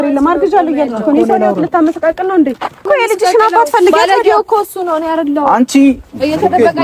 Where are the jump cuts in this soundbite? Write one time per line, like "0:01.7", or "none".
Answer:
0:02.9

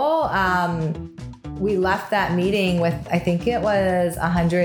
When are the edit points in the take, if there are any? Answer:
0:01.4

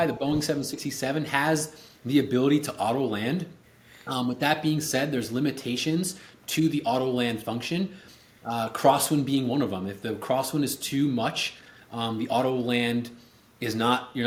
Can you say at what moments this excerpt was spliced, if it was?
none

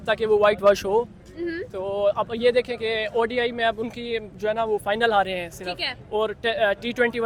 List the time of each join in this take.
none

